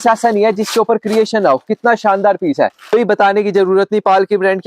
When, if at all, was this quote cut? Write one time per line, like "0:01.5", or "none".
0:02.9